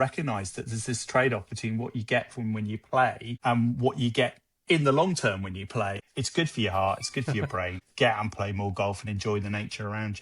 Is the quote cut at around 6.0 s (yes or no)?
yes